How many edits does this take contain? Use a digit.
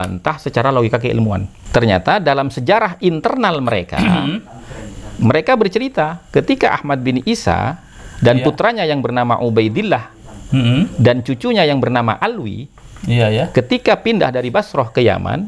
1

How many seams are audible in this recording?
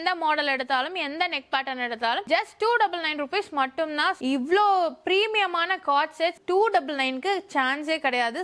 2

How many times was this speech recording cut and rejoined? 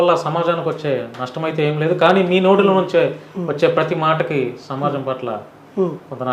0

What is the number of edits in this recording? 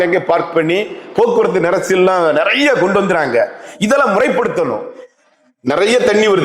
1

